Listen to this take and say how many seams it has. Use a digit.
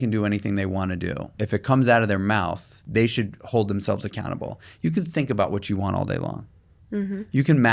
2